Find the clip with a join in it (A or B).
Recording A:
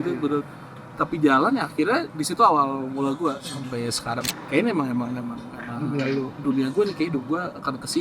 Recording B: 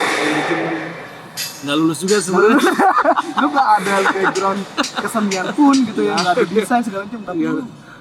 A